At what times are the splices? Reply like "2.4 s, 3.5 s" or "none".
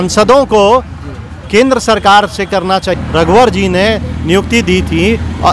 3.0 s